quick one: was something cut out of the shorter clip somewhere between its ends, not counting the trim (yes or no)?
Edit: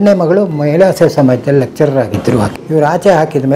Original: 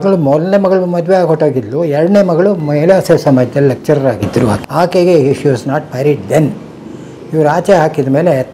yes